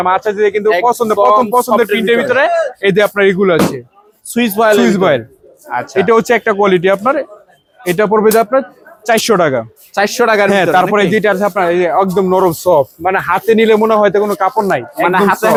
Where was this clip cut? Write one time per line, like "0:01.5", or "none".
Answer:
none